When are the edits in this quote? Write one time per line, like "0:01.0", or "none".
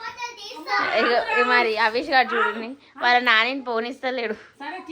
none

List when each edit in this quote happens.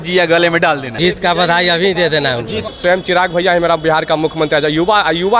0:00.9
0:02.6

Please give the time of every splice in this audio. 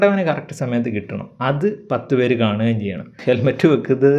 0:03.1

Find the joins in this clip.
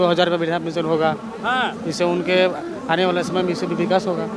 none

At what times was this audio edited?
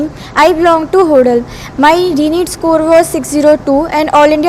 none

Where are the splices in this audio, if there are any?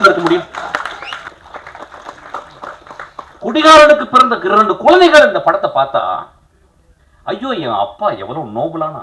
0:01.2

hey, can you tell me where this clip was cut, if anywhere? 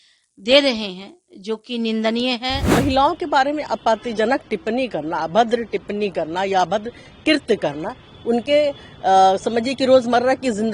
0:02.6

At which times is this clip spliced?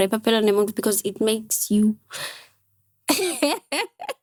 none

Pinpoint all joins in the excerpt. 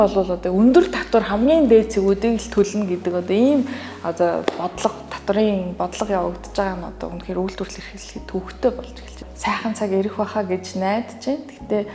0:09.2

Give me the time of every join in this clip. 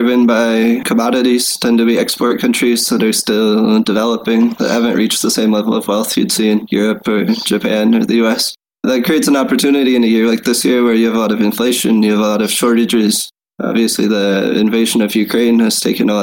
none

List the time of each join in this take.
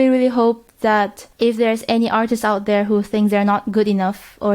0:01.2

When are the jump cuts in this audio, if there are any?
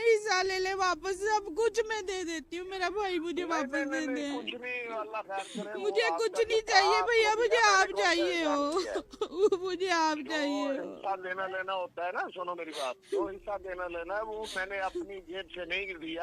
none

